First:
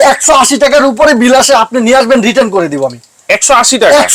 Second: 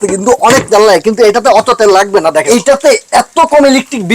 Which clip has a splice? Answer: second; 1 cut; at 2.4 s

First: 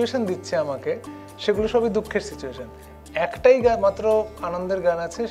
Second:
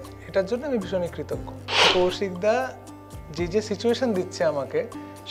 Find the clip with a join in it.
second; 1 cut; at 1.9 s

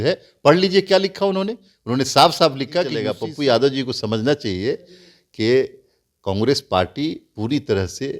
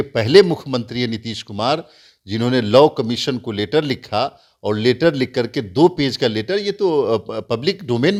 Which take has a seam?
first; 1 cut; at 3.2 s

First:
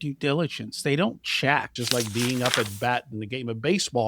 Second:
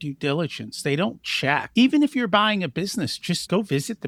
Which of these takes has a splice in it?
first; 1 cut; at 1.7 s

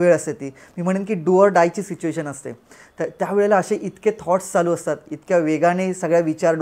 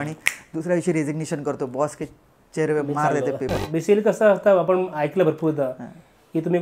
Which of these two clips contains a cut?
second; 1 cut; at 3.6 s

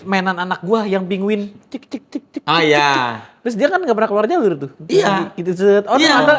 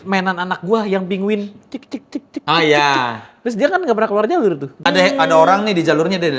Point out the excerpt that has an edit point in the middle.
second; 1 cut; at 4.9 s

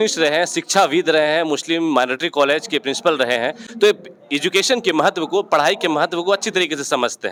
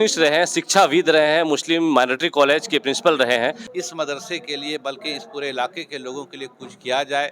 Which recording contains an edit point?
second; 1 cut; at 3.6 s

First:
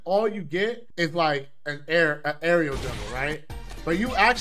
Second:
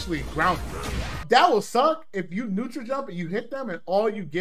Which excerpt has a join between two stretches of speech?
second; 1 cut; at 1.1 s

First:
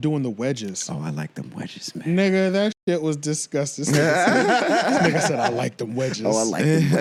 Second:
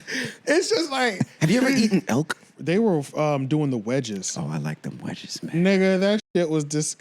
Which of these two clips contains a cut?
second; 1 cut; at 2.5 s

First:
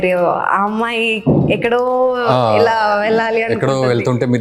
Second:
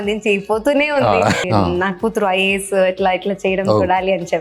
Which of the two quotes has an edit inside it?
second; 1 cut; at 1.4 s

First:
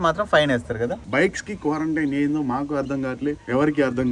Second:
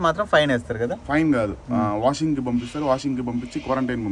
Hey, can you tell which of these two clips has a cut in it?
first; 1 cut; at 1.0 s

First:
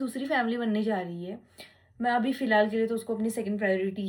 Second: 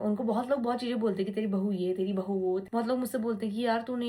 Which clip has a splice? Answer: second; 1 cut; at 2.7 s

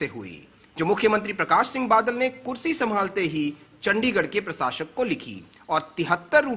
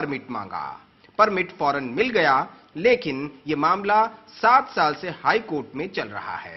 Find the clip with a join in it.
second; 1 cut; at 3.3 s

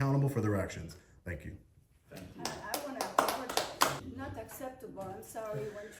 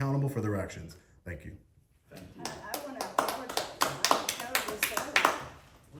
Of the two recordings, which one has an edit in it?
first; 1 cut; at 4.0 s

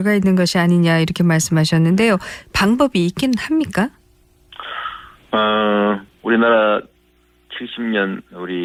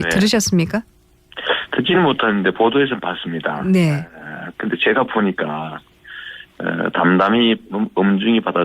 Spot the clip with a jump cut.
second; 1 cut; at 2.6 s

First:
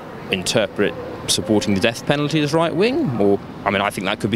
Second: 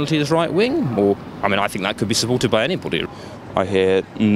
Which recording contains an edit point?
second; 1 cut; at 3.0 s

